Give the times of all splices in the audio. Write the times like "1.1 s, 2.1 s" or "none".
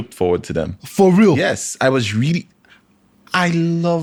none